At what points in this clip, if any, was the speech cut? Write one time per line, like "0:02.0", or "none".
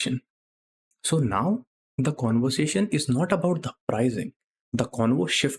none